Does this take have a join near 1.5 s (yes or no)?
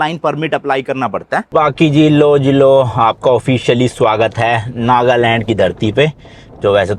yes